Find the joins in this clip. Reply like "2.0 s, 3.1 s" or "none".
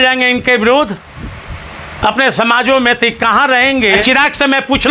4.0 s